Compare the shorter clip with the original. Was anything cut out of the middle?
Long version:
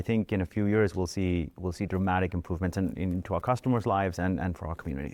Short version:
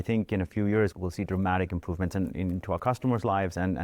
yes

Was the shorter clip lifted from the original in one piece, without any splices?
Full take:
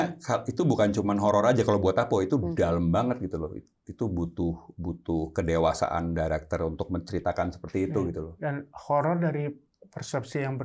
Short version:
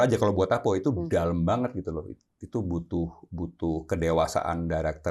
yes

